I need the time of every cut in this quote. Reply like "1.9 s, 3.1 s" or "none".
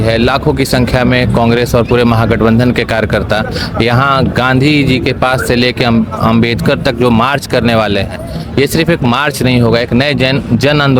none